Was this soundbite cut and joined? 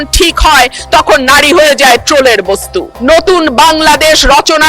yes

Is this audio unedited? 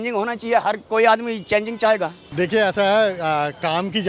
no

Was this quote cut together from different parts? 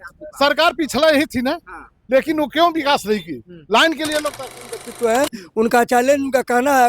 yes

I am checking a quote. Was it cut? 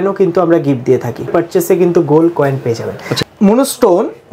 yes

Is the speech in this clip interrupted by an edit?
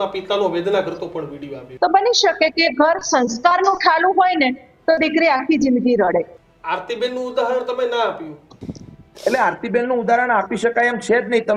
yes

